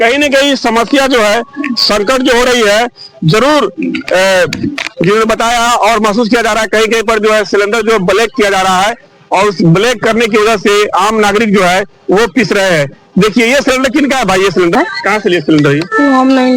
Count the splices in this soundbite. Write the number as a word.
zero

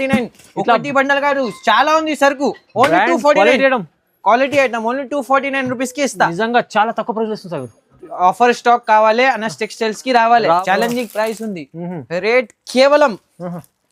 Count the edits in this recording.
one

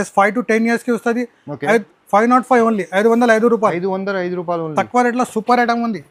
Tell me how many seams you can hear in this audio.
zero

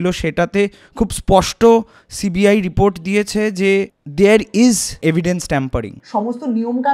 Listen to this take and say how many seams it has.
three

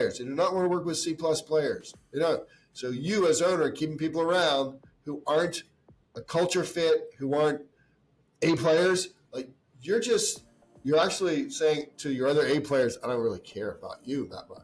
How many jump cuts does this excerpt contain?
zero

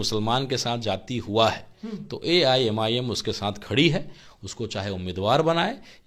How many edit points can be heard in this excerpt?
zero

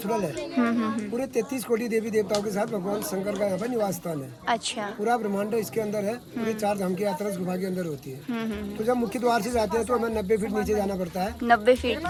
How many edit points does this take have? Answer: zero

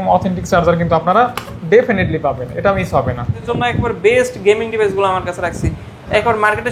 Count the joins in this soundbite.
one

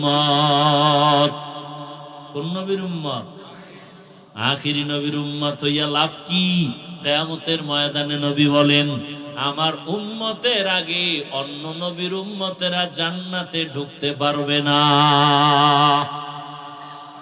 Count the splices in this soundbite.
zero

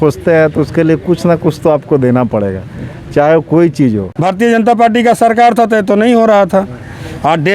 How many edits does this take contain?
one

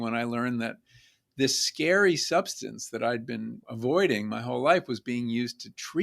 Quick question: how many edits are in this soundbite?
one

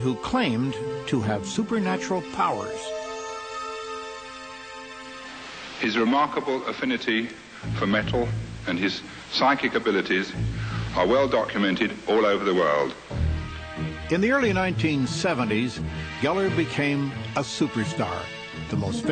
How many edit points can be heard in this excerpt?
zero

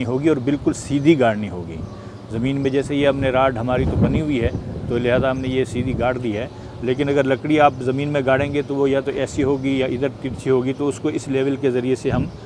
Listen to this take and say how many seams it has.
zero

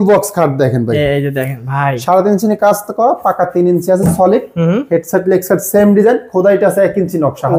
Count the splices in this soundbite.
zero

